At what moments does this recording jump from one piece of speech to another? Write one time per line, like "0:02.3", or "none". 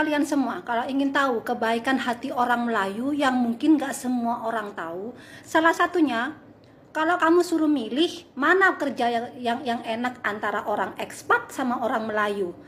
none